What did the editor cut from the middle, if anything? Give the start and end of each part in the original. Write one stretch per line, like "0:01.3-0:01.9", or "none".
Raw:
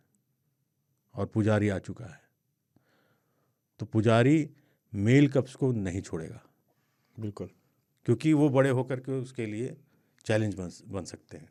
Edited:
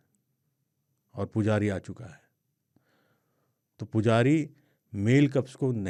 none